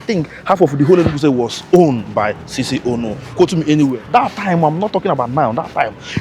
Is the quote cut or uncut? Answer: cut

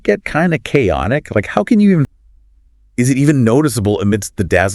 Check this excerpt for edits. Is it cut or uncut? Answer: cut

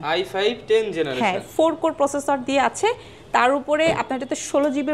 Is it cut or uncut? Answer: uncut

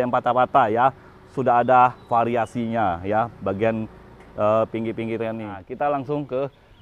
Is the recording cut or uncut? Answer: cut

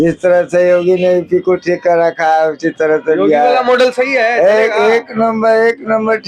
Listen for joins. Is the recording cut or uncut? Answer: uncut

